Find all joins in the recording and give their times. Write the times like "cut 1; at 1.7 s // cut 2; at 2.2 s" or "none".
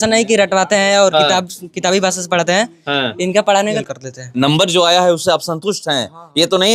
cut 1; at 3.8 s